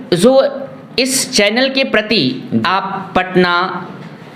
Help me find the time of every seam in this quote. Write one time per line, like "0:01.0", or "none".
none